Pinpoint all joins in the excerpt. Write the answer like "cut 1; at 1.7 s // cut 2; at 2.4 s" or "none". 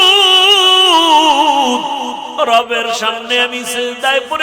cut 1; at 2.3 s